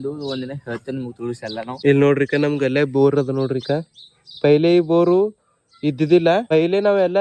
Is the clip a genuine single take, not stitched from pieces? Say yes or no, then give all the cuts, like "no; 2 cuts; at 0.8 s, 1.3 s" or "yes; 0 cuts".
no; 2 cuts; at 1.8 s, 6.5 s